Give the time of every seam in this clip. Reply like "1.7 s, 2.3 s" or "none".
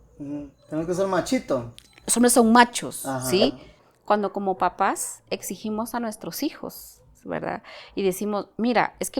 3.9 s